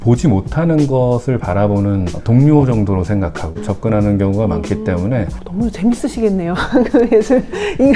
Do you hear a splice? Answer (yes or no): yes